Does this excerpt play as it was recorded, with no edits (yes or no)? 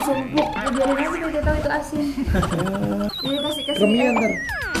no